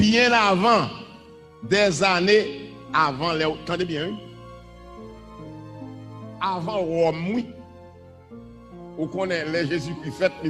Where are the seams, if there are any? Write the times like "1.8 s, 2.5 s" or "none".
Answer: none